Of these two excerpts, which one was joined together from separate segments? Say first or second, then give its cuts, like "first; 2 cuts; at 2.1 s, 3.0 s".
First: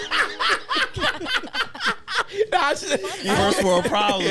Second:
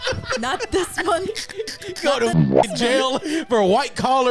first; 1 cut; at 3.1 s